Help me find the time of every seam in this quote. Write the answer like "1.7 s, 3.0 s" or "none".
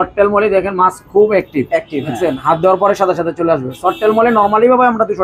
none